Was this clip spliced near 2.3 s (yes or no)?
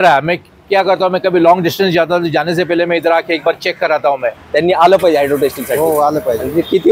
no